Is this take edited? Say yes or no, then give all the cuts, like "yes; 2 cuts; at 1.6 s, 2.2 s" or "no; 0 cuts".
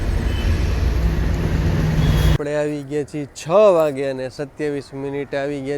yes; 1 cut; at 2.4 s